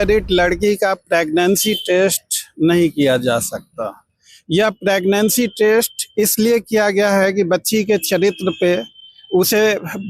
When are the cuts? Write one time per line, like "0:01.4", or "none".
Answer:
none